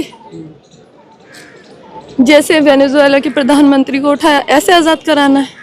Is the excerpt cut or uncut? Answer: uncut